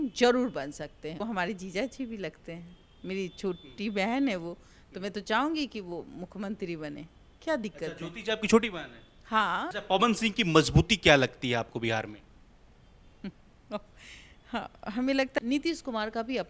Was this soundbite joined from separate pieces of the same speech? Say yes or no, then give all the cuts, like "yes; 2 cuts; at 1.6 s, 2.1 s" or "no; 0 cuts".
yes; 3 cuts; at 1.2 s, 9.7 s, 15.4 s